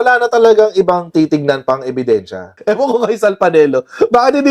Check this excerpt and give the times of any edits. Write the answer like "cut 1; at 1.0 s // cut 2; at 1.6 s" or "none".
cut 1; at 2.5 s